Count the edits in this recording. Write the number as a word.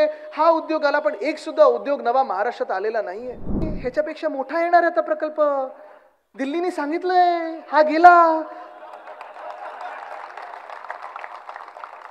one